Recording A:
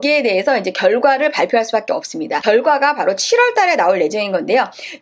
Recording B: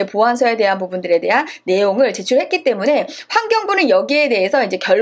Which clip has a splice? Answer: A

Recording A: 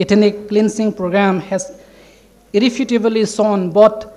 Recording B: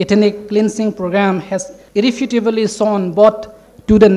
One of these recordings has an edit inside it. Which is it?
B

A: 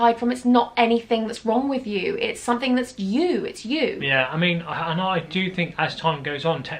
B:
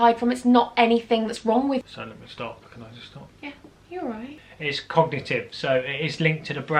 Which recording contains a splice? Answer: B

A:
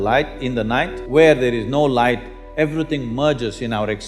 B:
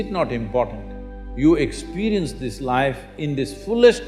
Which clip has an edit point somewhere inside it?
A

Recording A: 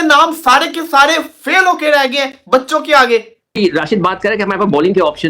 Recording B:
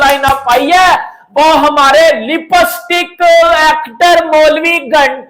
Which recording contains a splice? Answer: A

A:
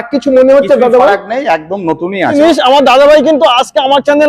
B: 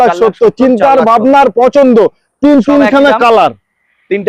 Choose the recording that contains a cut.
A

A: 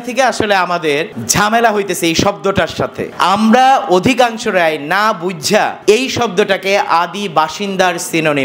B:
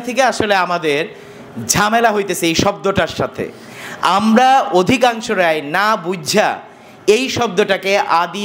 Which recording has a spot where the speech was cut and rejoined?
A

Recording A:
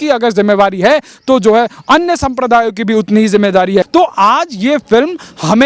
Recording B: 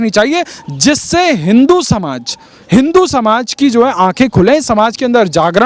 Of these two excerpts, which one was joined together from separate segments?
A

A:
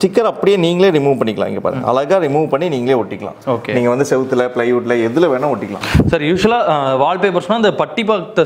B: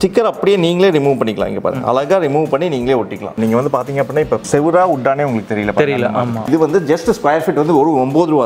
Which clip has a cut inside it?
B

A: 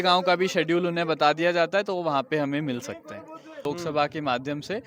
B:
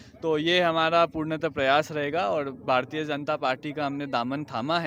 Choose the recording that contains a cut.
A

